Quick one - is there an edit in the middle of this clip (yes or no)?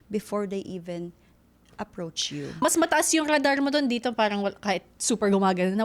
yes